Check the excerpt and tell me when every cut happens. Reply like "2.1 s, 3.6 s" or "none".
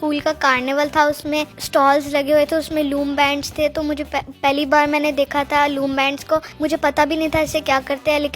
1.6 s, 4.3 s, 6.5 s